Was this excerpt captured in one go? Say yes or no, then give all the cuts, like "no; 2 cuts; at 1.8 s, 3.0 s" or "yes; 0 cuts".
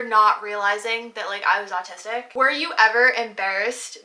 no; 1 cut; at 2.3 s